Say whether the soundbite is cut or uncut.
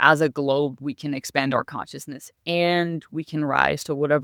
uncut